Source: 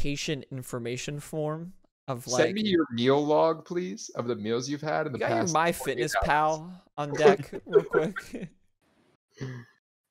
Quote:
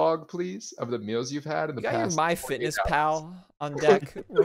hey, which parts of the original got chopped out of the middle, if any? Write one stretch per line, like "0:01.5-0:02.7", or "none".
none